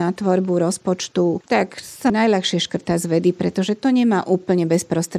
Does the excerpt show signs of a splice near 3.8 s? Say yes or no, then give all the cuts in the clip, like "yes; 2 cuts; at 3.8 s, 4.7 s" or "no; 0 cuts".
no; 1 cut; at 2.1 s